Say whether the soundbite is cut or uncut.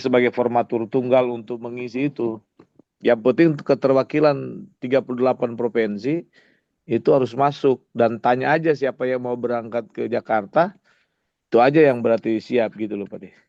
uncut